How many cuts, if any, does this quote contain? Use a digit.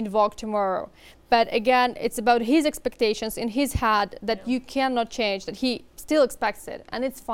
0